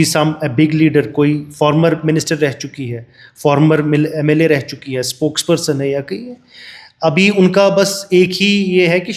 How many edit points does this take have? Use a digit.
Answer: 0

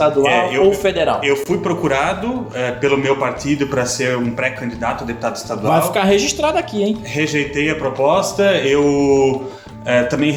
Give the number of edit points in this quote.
0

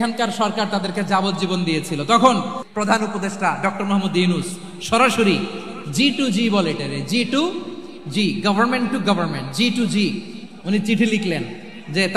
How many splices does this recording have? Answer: 1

